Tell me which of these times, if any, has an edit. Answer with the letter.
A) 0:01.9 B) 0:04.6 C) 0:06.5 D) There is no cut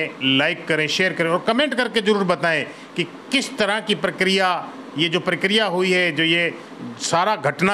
D